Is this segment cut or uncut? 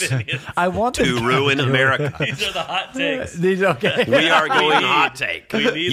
uncut